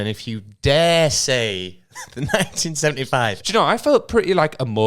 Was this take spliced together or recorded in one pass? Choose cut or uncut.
cut